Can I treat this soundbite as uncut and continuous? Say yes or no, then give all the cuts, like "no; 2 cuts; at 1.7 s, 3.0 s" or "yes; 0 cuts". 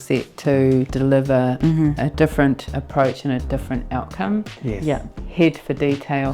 yes; 0 cuts